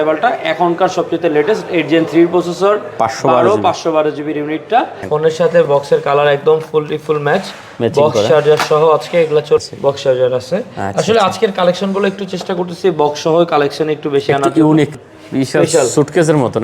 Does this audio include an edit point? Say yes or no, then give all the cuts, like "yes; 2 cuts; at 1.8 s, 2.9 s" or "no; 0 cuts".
yes; 3 cuts; at 5.0 s, 9.6 s, 14.9 s